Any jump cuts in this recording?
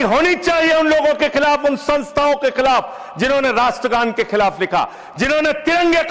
no; 0 cuts

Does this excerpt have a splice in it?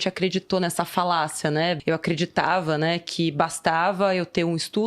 yes; 1 cut; at 1.8 s

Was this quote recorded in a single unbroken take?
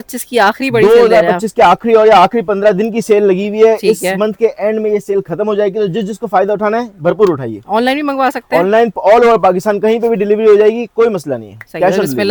yes; 0 cuts

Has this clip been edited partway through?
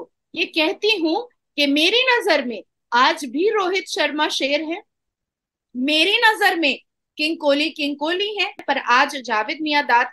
yes; 1 cut; at 8.6 s

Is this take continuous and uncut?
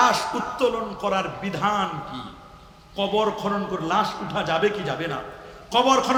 yes; 0 cuts

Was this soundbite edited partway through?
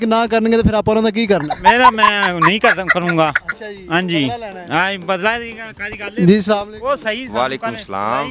no; 0 cuts

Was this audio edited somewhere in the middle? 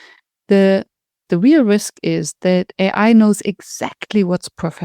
yes; 1 cut; at 1.2 s

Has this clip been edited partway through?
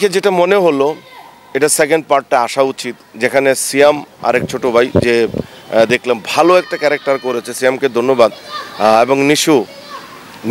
no; 0 cuts

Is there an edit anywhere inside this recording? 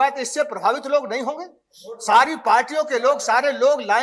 no; 0 cuts

